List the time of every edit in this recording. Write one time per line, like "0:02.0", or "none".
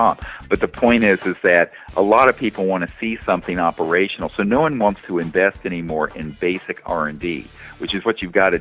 0:05.4